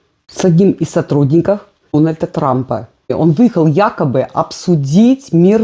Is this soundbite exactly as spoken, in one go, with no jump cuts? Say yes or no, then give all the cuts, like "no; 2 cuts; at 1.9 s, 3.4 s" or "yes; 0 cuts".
no; 1 cut; at 3.1 s